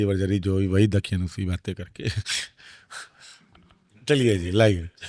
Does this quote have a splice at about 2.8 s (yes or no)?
no